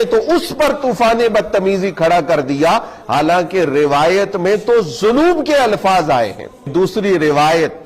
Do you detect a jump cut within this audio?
yes; 1 cut; at 6.7 s

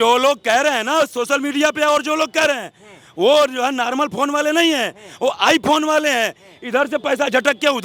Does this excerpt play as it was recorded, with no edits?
yes; 0 cuts

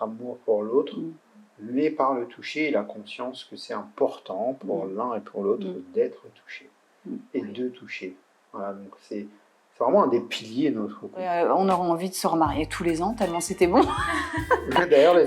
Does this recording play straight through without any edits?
no; 1 cut; at 11.3 s

